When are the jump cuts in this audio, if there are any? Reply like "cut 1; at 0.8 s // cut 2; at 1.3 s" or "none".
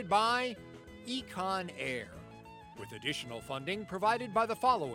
none